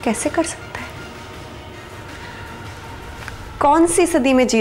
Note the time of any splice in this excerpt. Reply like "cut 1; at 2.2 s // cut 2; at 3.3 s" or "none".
none